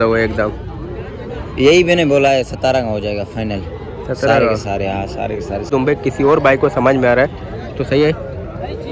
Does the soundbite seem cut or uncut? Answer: cut